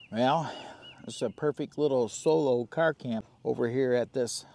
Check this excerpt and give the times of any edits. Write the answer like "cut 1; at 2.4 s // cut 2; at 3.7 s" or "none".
cut 1; at 3.3 s